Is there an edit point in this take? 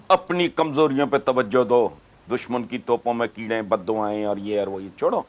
no; 0 cuts

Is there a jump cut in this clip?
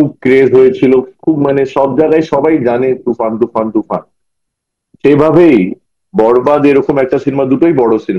no; 0 cuts

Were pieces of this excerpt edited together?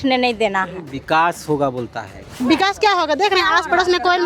yes; 1 cut; at 2.3 s

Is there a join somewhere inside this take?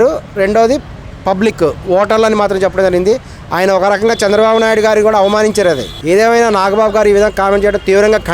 yes; 1 cut; at 5.9 s

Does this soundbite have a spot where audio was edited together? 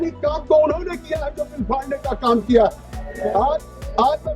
no; 0 cuts

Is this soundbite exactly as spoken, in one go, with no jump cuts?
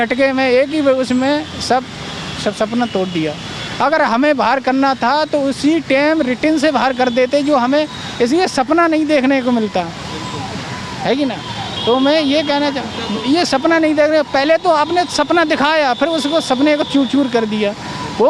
yes; 0 cuts

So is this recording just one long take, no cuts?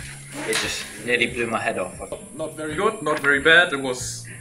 no; 1 cut; at 2.2 s

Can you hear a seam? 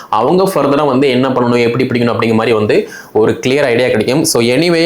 no; 0 cuts

